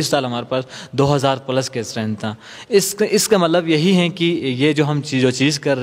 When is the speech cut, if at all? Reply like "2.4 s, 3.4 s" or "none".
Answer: none